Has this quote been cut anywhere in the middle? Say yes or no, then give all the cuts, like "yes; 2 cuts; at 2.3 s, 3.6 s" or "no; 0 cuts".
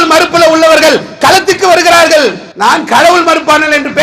yes; 1 cut; at 2.5 s